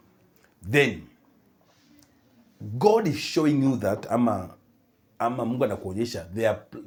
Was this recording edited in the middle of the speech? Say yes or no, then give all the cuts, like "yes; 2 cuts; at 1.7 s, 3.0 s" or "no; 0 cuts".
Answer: no; 0 cuts